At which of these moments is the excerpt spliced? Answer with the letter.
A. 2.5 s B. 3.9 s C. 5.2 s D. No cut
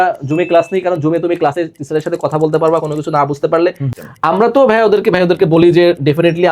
B